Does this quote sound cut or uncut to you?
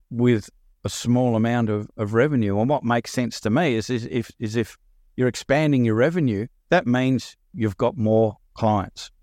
uncut